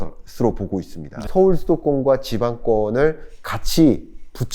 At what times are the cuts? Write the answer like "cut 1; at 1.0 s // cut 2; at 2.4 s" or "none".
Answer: cut 1; at 1.2 s